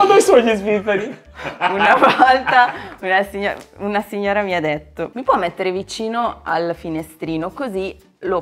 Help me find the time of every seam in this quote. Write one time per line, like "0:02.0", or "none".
0:05.1